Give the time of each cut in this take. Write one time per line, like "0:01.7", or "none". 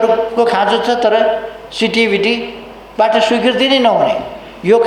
none